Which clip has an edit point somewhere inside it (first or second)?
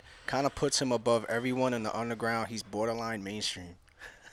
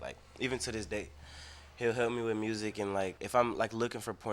second